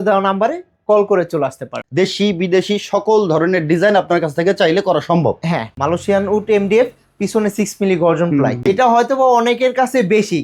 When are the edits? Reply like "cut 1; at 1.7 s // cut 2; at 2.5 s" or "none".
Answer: cut 1; at 1.8 s // cut 2; at 5.8 s // cut 3; at 8.6 s